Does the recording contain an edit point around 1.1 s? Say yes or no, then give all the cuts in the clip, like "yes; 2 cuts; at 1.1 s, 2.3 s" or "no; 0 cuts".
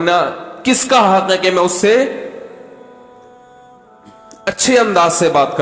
no; 2 cuts; at 2.7 s, 4.4 s